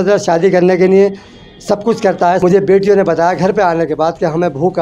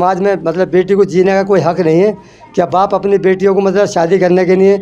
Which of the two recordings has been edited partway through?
first; 1 cut; at 2.4 s

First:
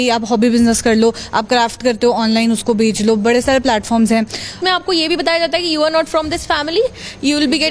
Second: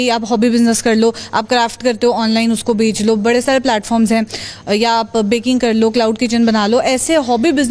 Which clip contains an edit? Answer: first; 1 cut; at 4.6 s

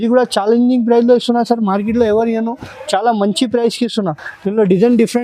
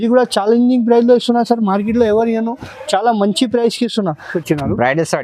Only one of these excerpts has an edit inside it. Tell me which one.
second; 1 cut; at 4.3 s

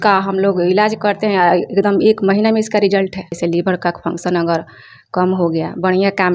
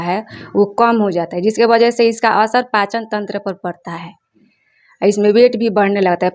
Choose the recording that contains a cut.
first; 1 cut; at 3.4 s

